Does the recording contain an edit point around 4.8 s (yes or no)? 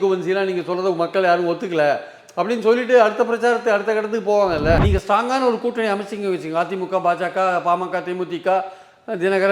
yes